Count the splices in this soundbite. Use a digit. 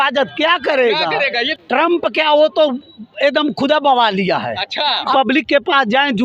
2